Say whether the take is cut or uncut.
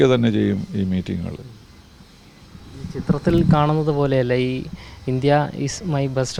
uncut